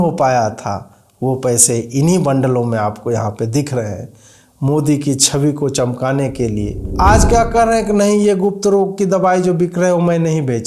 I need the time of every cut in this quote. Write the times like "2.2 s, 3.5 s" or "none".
6.8 s